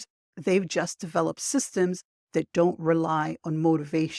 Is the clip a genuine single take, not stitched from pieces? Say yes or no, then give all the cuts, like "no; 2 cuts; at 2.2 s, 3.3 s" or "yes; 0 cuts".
yes; 0 cuts